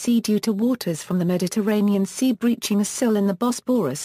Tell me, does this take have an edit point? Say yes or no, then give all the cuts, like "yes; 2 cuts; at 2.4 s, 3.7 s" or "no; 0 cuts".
no; 0 cuts